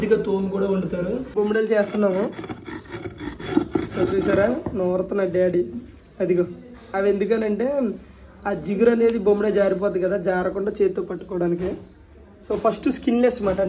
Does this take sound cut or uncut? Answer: cut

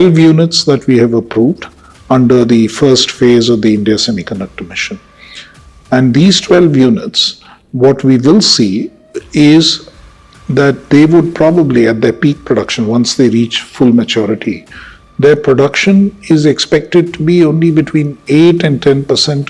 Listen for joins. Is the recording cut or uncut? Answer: uncut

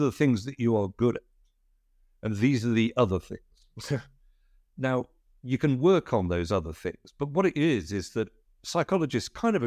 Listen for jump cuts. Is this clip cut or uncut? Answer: uncut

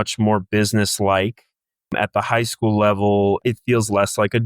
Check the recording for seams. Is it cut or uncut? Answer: cut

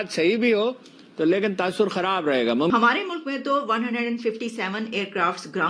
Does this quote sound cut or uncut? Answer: cut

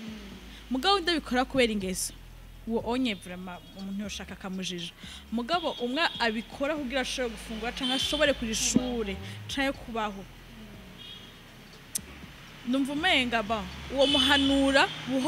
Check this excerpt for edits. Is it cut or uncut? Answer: uncut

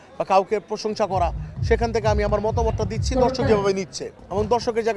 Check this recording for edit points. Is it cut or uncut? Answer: uncut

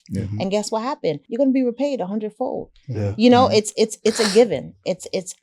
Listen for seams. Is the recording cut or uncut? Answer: cut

